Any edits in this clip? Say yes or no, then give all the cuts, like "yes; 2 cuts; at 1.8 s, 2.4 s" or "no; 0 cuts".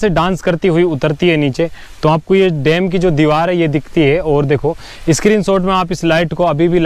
no; 0 cuts